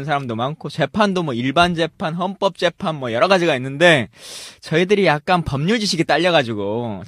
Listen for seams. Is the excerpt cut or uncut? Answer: uncut